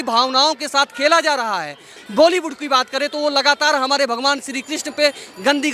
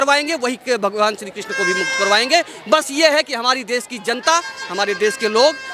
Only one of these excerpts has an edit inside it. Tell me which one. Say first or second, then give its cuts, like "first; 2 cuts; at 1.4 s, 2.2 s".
first; 1 cut; at 1.9 s